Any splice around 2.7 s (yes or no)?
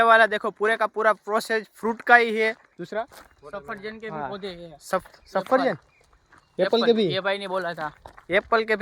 yes